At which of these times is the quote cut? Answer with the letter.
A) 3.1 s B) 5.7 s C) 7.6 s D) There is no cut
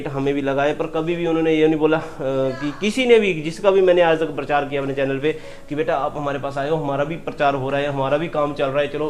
D